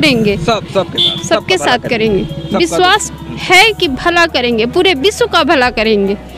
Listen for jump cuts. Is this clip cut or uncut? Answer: uncut